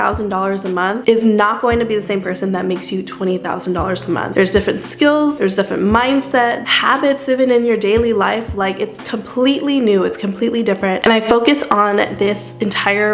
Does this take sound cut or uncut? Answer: uncut